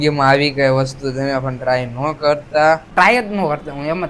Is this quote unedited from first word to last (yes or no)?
no